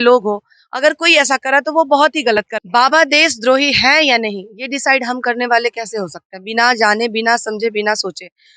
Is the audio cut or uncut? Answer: cut